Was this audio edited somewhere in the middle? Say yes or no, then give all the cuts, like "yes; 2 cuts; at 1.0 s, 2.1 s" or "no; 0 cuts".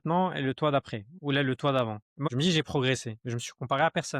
yes; 1 cut; at 2.3 s